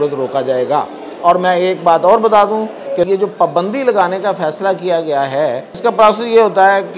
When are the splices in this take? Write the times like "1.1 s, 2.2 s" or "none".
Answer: 3.1 s, 5.7 s